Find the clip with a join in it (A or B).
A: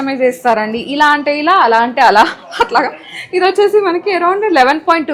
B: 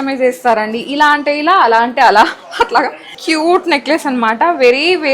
B